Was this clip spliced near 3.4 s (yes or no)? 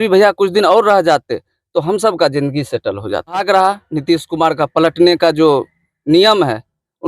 yes